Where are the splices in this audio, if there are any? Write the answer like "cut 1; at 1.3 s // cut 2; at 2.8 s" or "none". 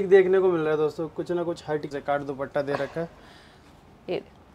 cut 1; at 1.9 s